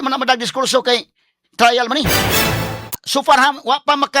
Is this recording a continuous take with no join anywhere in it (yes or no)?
no